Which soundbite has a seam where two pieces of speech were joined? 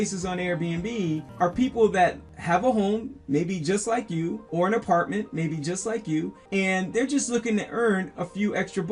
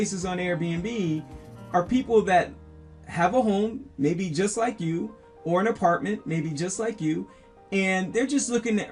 first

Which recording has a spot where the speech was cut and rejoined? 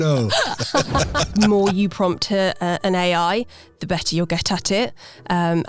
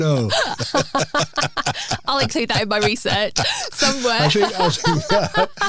first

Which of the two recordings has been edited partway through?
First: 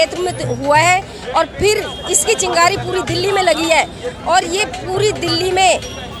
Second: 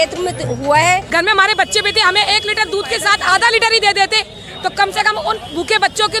second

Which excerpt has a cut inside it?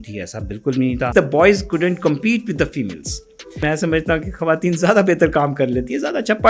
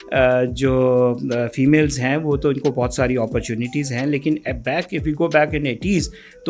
first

